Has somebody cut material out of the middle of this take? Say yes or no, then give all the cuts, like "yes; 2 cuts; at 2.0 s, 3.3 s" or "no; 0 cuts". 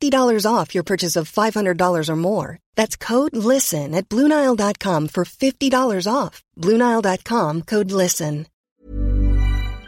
yes; 1 cut; at 8.5 s